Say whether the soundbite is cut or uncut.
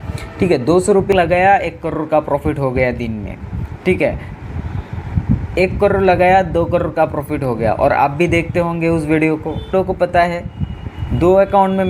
cut